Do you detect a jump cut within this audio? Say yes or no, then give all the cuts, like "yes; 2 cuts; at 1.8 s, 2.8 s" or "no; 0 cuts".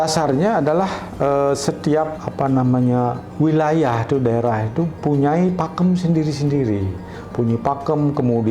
yes; 1 cut; at 2.2 s